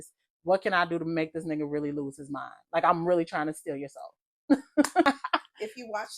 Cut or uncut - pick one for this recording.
cut